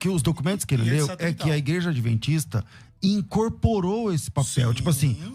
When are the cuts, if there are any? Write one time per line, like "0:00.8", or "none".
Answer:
none